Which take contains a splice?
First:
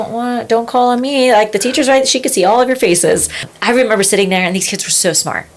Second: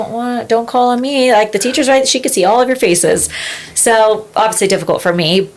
first; 1 cut; at 3.5 s

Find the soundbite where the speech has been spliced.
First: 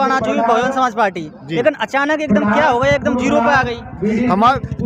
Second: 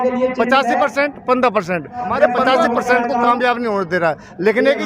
second; 1 cut; at 2.4 s

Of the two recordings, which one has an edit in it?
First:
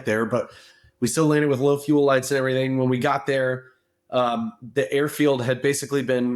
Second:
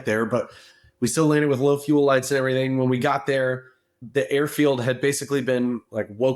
second; 1 cut; at 4.0 s

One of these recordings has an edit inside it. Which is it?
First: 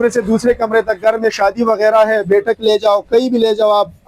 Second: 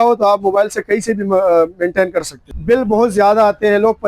second; 1 cut; at 2.5 s

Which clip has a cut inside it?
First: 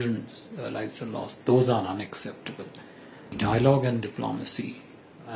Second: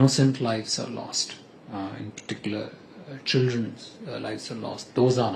first; 1 cut; at 3.3 s

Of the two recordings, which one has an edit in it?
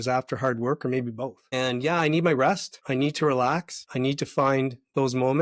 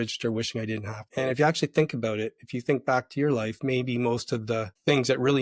first; 3 cuts; at 1.4 s, 2.7 s, 3.8 s

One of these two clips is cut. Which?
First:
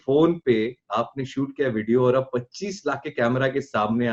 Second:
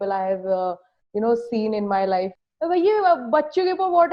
second; 1 cut; at 2.4 s

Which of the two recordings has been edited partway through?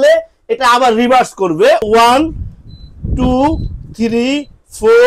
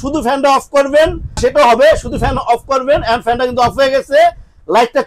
first; 1 cut; at 1.8 s

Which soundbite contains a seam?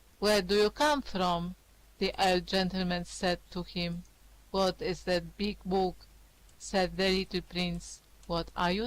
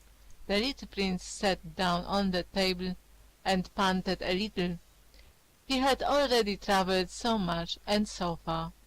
second; 1 cut; at 5.8 s

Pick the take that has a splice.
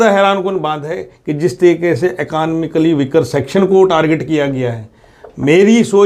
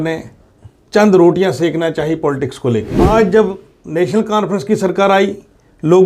second; 1 cut; at 3.0 s

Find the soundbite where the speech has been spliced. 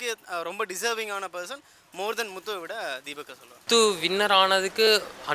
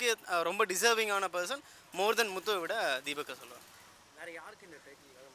first; 1 cut; at 3.6 s

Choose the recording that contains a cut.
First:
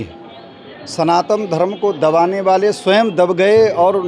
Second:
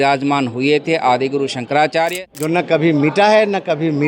second; 1 cut; at 2.1 s

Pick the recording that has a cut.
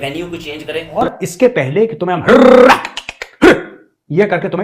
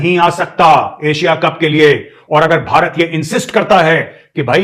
first; 1 cut; at 1.0 s

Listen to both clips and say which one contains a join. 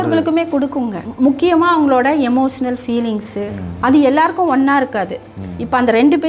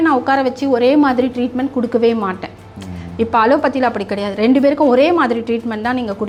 first; 2 cuts; at 1.0 s, 3.6 s

